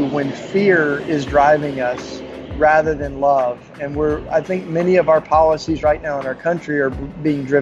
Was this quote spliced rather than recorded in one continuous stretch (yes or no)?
no